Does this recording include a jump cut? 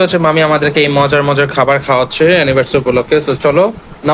no; 0 cuts

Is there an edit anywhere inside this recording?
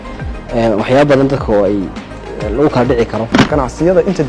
yes; 1 cut; at 3.4 s

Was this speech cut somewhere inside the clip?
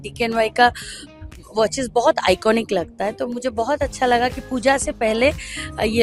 no; 0 cuts

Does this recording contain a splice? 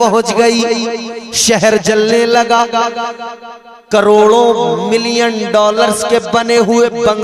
no; 0 cuts

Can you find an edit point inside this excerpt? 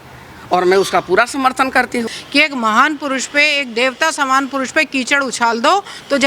yes; 1 cut; at 2.2 s

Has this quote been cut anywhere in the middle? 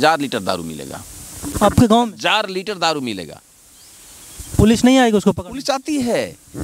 no; 0 cuts

